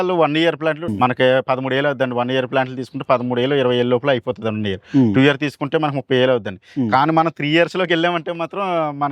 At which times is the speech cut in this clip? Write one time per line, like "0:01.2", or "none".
0:00.9